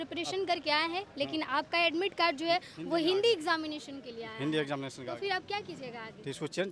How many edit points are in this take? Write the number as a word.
zero